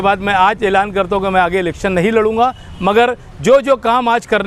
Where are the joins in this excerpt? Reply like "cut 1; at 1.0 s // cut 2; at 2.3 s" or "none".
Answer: none